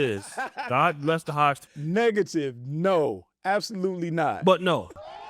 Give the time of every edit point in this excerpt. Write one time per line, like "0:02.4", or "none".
0:04.4